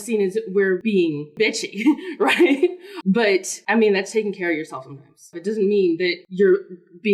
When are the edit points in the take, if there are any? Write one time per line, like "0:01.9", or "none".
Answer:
0:01.0
0:03.1
0:05.3
0:06.2